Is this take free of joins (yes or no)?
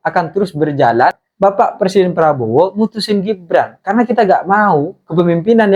no